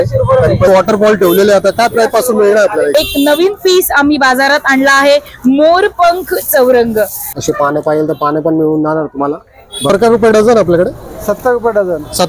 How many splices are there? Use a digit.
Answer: 4